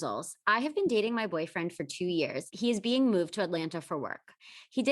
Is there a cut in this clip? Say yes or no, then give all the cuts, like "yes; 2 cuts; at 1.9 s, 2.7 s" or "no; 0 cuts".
yes; 1 cut; at 2.5 s